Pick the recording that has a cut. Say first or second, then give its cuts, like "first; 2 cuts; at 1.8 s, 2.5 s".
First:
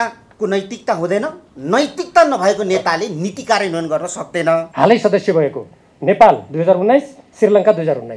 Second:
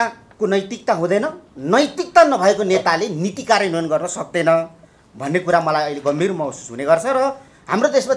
first; 1 cut; at 4.7 s